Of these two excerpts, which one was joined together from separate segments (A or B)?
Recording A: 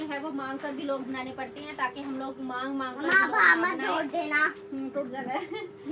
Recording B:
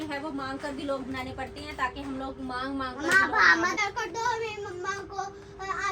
B